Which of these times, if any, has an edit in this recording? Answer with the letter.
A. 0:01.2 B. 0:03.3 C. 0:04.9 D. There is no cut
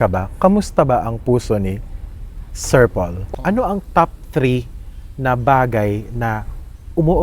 B